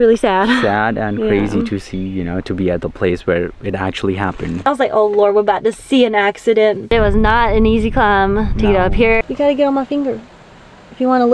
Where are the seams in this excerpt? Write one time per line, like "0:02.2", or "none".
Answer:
0:04.6
0:06.9
0:09.2